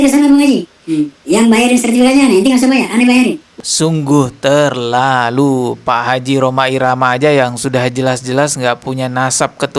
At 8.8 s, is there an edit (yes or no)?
no